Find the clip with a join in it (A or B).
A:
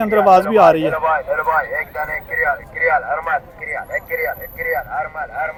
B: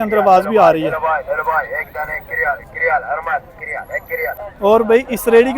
B